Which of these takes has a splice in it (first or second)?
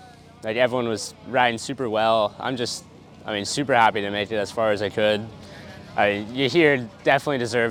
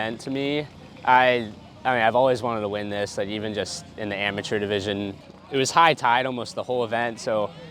second